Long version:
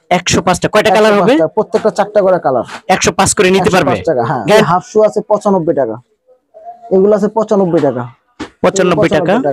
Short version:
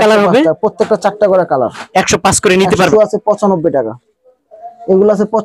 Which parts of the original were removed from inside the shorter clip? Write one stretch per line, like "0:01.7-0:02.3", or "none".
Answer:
0:03.8-0:04.9